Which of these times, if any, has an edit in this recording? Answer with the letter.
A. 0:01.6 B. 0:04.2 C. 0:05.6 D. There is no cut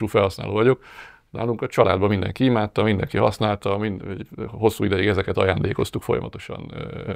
D